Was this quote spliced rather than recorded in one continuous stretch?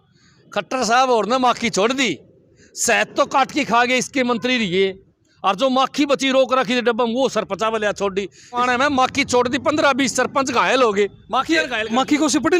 yes; 1 cut; at 8.6 s

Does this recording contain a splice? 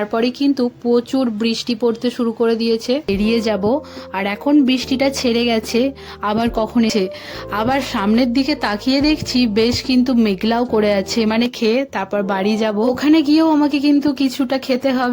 yes; 3 cuts; at 3.1 s, 6.9 s, 11.5 s

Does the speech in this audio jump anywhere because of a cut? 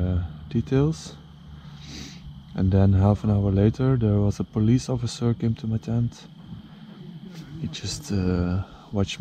no; 0 cuts

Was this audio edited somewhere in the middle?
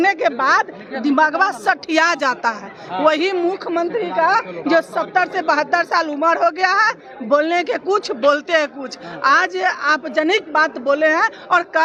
no; 0 cuts

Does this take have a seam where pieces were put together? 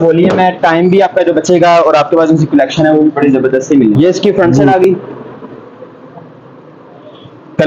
yes; 1 cut; at 4.3 s

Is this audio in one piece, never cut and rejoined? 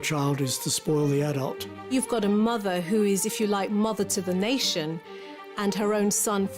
no; 1 cut; at 1.7 s

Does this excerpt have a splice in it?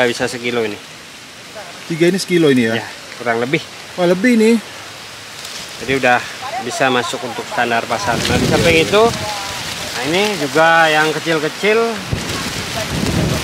no; 0 cuts

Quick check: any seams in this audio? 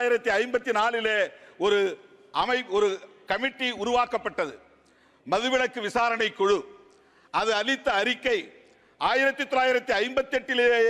no; 0 cuts

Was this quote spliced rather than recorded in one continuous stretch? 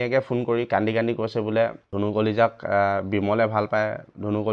yes; 1 cut; at 1.9 s

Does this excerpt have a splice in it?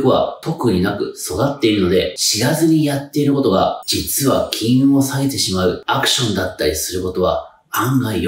no; 0 cuts

